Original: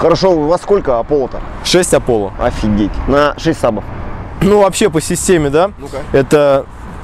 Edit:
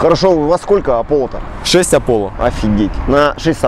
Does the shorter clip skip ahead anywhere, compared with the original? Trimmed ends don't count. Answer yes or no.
no